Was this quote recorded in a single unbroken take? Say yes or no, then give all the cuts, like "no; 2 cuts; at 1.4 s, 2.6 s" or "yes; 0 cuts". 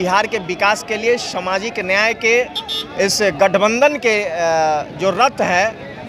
yes; 0 cuts